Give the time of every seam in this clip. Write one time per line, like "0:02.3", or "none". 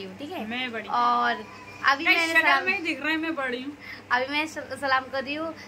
none